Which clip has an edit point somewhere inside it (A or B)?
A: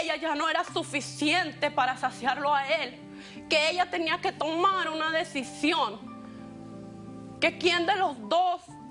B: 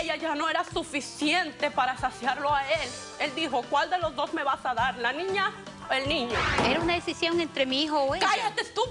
B